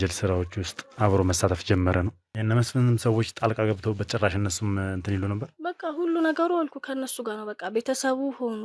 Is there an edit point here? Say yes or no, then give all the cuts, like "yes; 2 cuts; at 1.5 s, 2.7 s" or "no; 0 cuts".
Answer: yes; 1 cut; at 2.2 s